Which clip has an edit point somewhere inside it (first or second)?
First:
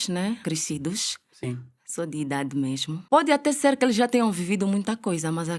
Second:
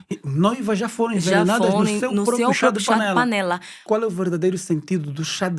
second